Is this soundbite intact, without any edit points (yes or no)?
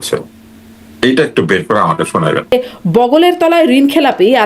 no